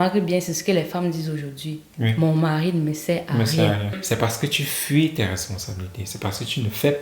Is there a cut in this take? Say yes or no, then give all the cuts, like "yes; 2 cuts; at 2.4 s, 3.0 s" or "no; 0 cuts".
yes; 1 cut; at 4.0 s